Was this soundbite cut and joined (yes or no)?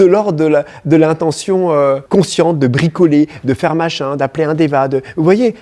yes